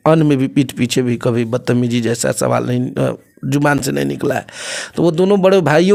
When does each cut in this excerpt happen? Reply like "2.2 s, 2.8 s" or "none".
none

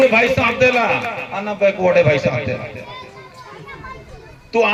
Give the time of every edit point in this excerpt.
none

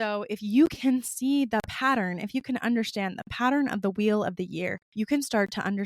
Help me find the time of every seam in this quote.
4.8 s

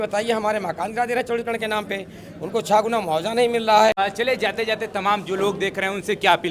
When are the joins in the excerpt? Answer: 4.0 s

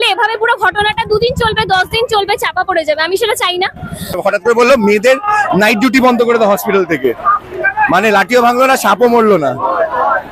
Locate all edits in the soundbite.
4.2 s

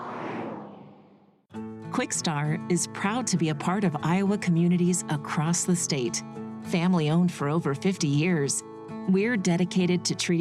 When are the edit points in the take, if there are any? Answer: 1.0 s

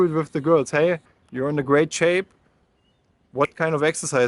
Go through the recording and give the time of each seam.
1.0 s

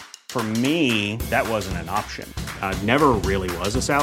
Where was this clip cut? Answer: none

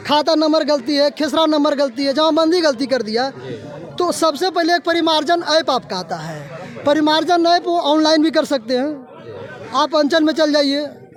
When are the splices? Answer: none

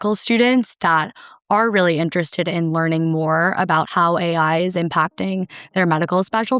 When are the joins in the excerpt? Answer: 3.9 s

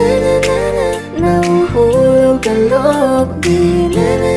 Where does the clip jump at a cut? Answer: none

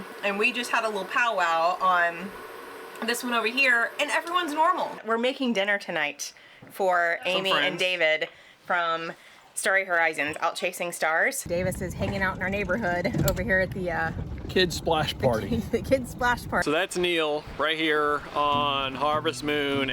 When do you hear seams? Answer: 5.0 s, 11.5 s, 16.6 s

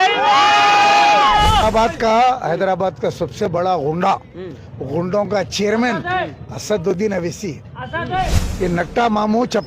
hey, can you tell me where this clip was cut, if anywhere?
1.6 s, 8.4 s

